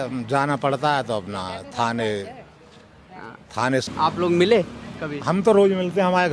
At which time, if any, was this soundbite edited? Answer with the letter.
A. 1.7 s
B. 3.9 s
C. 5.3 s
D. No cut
B